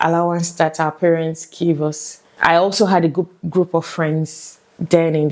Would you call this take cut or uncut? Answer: cut